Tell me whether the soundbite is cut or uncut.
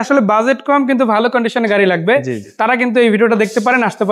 uncut